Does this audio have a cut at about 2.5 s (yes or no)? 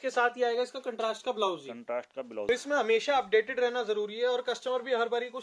yes